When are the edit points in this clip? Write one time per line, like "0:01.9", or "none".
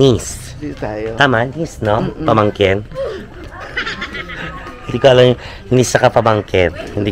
none